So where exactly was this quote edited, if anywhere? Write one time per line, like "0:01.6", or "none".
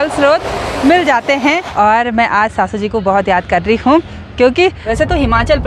0:01.7
0:04.8